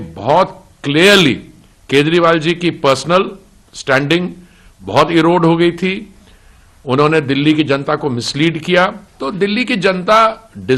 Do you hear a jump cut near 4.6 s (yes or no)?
no